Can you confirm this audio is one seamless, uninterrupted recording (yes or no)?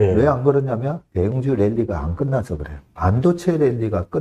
no